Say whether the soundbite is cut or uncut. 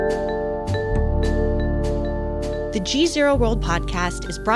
cut